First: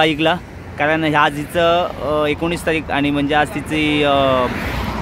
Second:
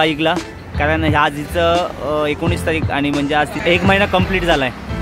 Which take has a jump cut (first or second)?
second